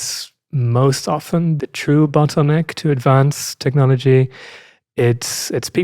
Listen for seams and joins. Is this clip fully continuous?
no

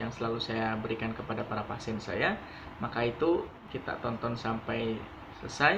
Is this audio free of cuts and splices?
no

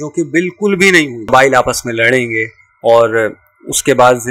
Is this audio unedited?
no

